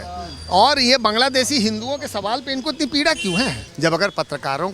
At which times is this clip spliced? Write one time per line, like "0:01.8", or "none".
0:03.7